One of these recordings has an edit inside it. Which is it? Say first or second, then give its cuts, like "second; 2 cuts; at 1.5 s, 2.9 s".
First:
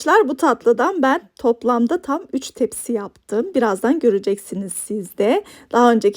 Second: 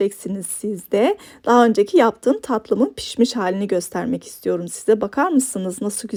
first; 1 cut; at 1.3 s